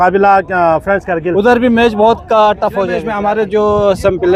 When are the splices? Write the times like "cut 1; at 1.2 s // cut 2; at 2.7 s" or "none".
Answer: cut 1; at 3.1 s